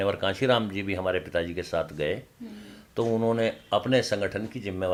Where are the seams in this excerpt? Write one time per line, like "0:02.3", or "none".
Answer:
none